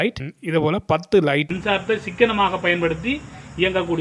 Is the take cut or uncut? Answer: cut